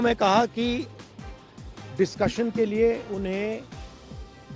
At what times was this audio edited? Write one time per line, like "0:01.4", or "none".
0:03.7